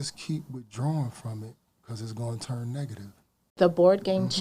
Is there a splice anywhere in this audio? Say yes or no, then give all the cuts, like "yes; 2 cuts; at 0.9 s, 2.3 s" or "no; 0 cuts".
yes; 1 cut; at 3.4 s